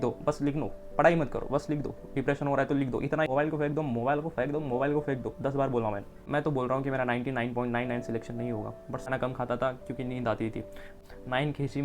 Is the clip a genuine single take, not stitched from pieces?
no; 4 cuts; at 3.3 s, 6.2 s, 9.1 s, 11.0 s

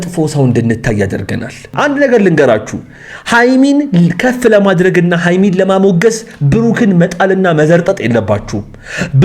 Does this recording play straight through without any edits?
no; 1 cut; at 1.7 s

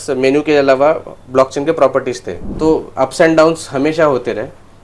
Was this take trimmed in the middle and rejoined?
yes; 1 cut; at 2.5 s

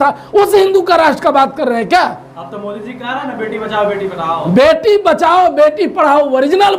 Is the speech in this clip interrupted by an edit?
no; 0 cuts

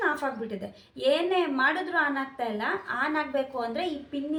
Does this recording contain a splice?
no; 0 cuts

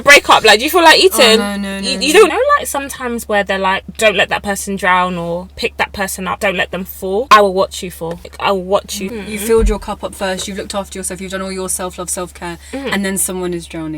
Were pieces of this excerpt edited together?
yes; 6 cuts; at 2.3 s, 3.8 s, 6.4 s, 7.3 s, 8.3 s, 9.1 s

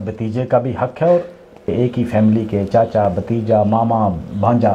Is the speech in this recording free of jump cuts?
no; 1 cut; at 1.7 s

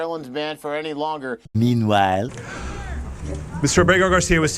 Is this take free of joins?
no; 2 cuts; at 1.5 s, 2.4 s

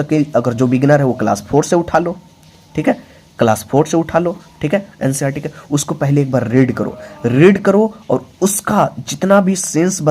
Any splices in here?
no; 0 cuts

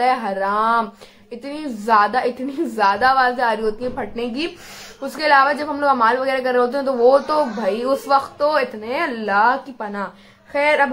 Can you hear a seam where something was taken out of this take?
no; 0 cuts

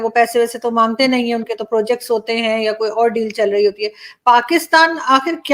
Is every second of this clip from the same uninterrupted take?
yes; 0 cuts

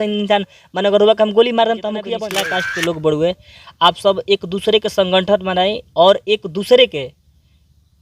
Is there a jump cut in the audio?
yes; 1 cut; at 2.2 s

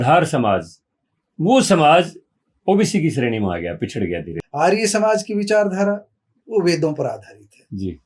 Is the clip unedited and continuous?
no; 1 cut; at 4.3 s

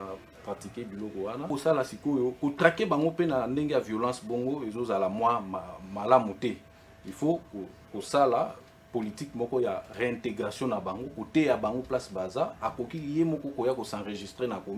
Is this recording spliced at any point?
yes; 1 cut; at 1.5 s

